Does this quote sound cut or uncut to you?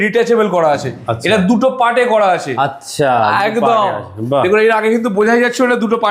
uncut